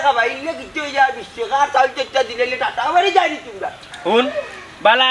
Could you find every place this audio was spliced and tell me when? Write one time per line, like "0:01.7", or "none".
0:03.8